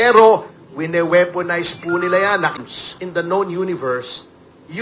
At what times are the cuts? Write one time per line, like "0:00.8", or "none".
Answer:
0:02.6